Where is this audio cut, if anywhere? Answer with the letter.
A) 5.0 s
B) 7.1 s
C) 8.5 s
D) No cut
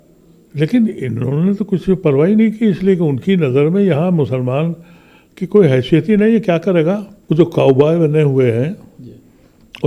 B